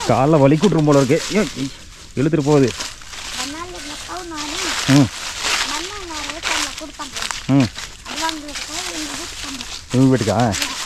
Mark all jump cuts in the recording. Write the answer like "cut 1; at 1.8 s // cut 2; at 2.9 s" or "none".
none